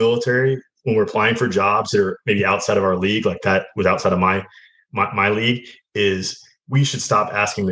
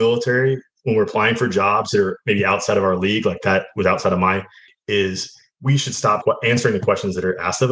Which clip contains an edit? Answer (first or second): second